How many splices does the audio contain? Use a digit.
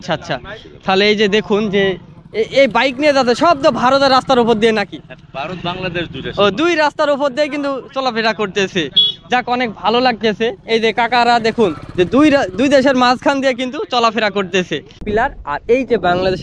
1